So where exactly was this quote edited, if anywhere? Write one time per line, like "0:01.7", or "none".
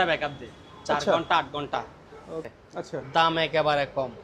0:02.4